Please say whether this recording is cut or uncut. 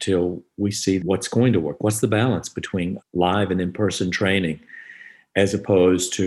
cut